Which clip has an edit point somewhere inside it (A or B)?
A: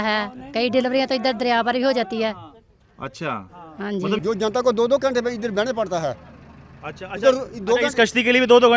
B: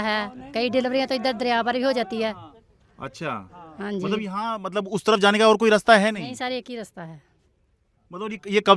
A